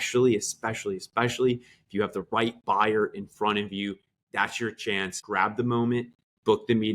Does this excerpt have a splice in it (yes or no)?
yes